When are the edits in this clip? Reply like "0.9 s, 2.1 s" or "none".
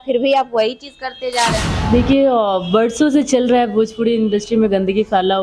1.7 s